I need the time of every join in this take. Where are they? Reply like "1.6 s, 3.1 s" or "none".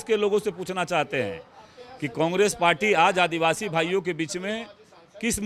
none